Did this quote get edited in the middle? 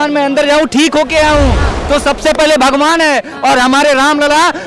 no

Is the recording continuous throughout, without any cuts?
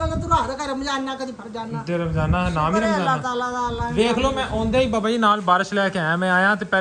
yes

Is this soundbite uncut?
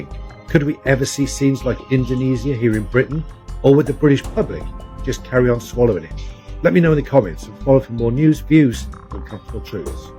yes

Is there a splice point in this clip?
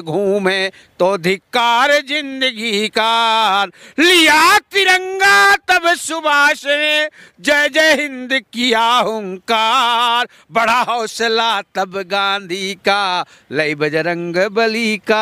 no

